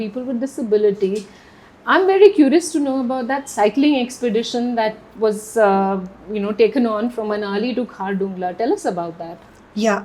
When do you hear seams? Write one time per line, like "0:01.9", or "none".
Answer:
none